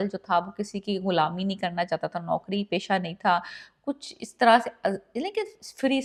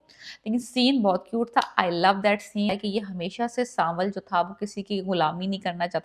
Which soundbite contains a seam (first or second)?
second